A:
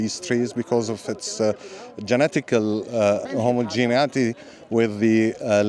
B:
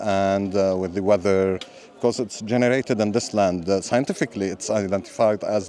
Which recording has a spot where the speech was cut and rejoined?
A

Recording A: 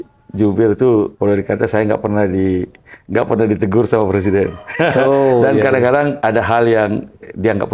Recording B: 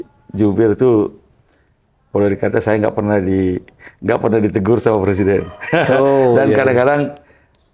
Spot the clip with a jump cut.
A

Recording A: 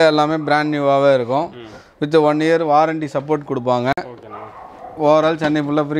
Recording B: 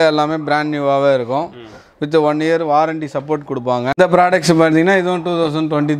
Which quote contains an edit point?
B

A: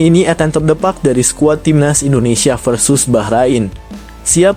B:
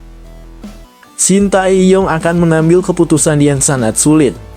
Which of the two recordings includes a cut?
B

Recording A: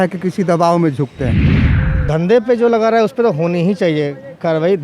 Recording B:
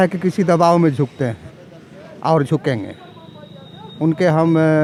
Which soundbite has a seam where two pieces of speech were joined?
A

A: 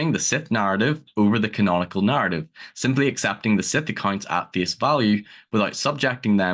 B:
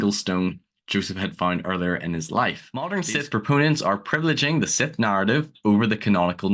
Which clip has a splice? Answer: B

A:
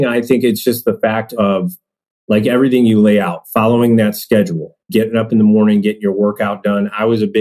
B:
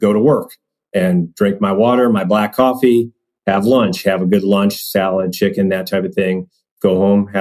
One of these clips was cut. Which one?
A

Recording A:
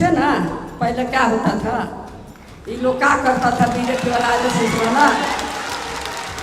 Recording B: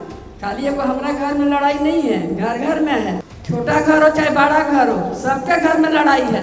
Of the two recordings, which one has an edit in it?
B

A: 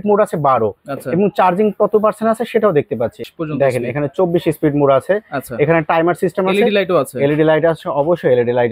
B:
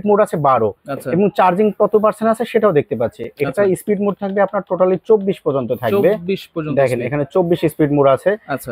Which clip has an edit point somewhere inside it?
A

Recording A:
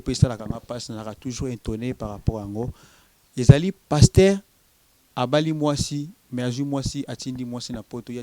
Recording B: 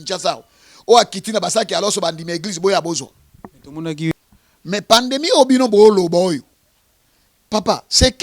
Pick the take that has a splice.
B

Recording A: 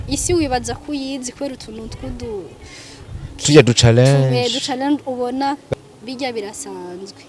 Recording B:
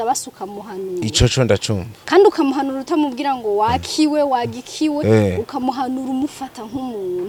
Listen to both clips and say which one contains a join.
A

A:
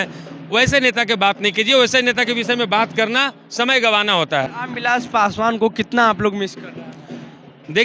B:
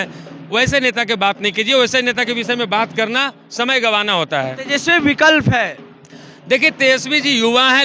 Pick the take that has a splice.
A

